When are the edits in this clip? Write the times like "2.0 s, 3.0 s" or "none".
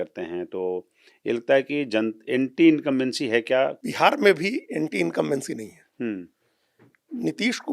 3.8 s